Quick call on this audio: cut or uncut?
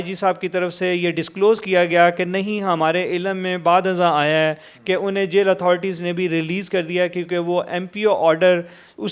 uncut